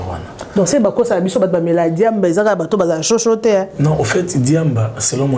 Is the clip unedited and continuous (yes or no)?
yes